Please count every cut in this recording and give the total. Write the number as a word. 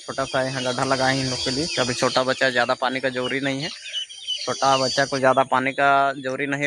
zero